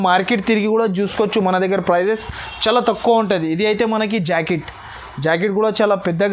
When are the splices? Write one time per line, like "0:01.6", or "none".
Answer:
none